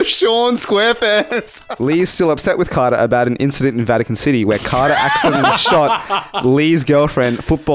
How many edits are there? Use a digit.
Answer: 1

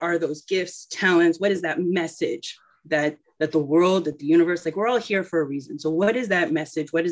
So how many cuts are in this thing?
1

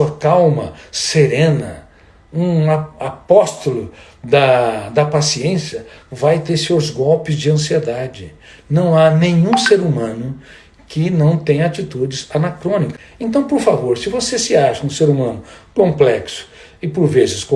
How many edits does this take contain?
1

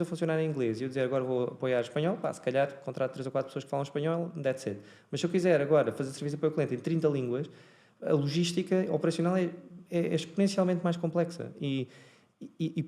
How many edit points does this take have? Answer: 0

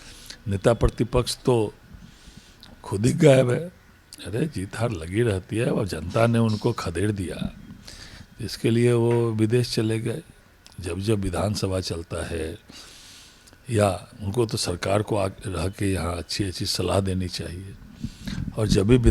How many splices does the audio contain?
0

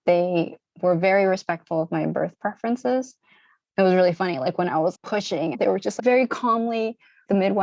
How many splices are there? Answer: 1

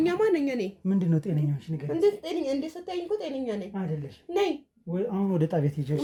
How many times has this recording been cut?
0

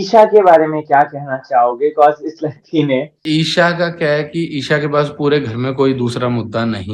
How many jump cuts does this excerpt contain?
1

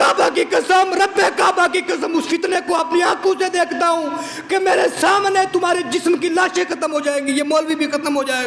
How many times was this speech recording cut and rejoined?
0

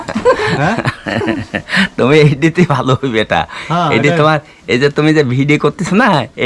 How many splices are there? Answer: 0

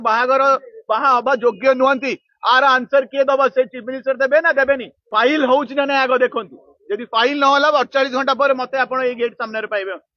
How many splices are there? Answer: 1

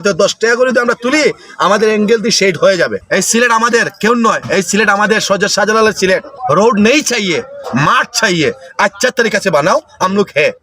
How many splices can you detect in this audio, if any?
2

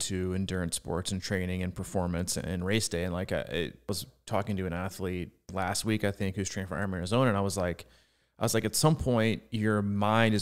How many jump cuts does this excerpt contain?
2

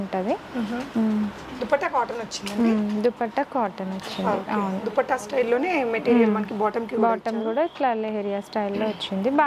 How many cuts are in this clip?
0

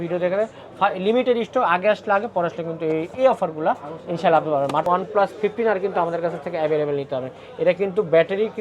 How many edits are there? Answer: 1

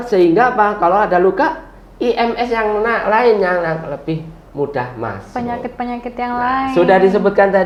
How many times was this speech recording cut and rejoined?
0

